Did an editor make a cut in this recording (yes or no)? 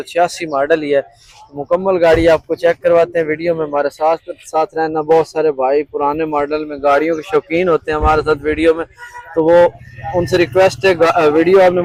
no